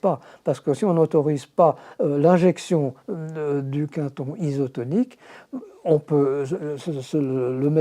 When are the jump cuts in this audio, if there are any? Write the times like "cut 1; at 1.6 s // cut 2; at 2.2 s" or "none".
none